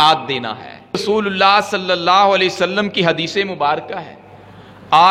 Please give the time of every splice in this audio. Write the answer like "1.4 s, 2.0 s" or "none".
1.0 s